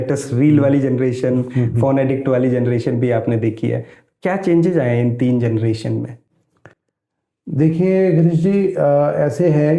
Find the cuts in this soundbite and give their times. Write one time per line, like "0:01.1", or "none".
none